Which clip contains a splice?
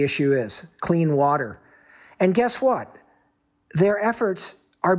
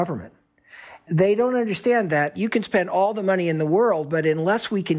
second; 2 cuts; at 1.0 s, 2.3 s

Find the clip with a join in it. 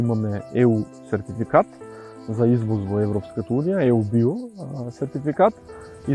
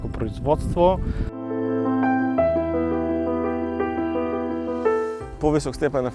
second; 2 cuts; at 1.5 s, 5.3 s

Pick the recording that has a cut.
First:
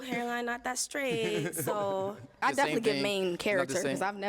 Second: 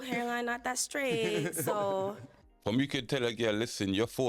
first; 1 cut; at 2.4 s

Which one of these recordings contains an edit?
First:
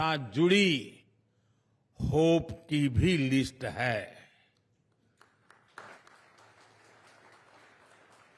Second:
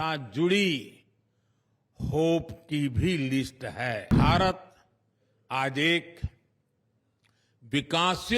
second; 1 cut; at 4.1 s

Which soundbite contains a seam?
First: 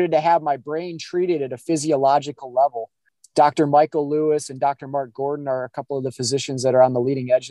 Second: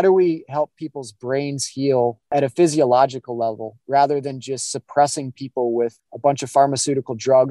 second; 2 cuts; at 2.3 s, 6.0 s

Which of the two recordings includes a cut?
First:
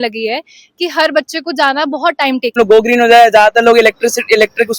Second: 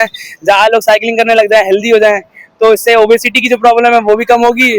first; 1 cut; at 2.5 s

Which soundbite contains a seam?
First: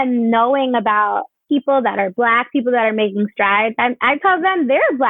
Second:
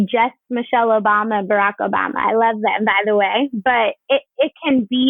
first; 1 cut; at 1.3 s

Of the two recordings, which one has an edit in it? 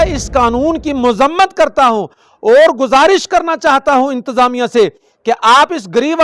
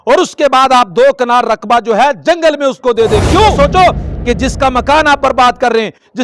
second; 1 cut; at 3.5 s

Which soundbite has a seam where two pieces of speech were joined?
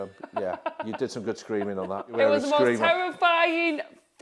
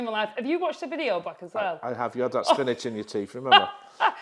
first; 1 cut; at 2.1 s

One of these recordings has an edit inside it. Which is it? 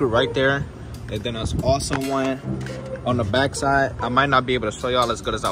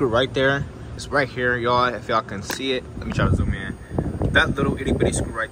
second; 1 cut; at 0.9 s

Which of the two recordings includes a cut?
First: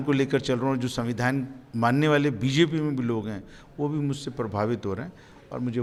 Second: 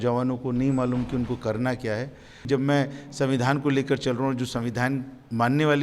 second; 1 cut; at 2.5 s

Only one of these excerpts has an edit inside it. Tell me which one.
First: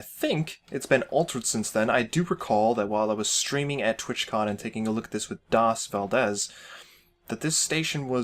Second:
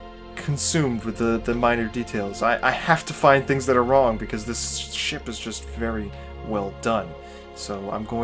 first; 1 cut; at 1.7 s

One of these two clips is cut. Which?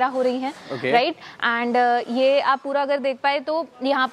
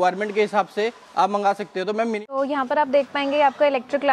second; 1 cut; at 2.2 s

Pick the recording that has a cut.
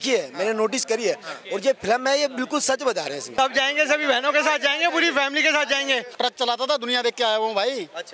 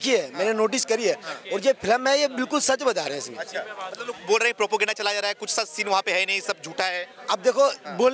first; 2 cuts; at 3.3 s, 6.1 s

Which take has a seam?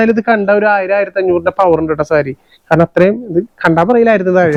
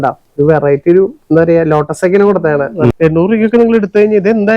second; 1 cut; at 2.9 s

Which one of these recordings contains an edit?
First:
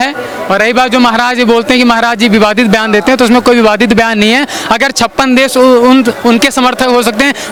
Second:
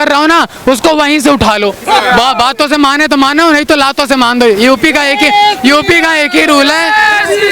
second; 1 cut; at 1.8 s

